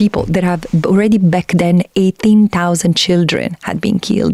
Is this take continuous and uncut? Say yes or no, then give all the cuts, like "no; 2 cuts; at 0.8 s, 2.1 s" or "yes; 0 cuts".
yes; 0 cuts